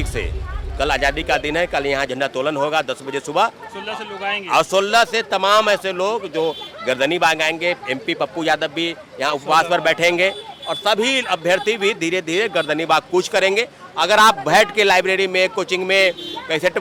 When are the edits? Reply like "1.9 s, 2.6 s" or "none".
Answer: none